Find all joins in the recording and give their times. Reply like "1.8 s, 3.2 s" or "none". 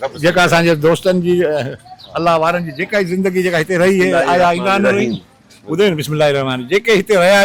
none